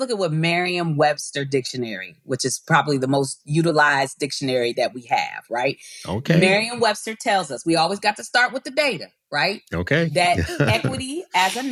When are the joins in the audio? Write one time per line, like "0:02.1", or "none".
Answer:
none